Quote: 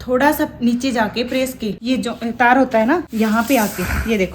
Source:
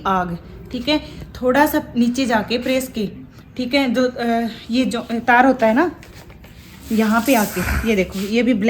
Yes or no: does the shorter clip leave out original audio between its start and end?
yes